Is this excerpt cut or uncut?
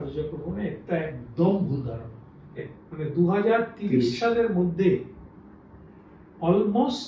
cut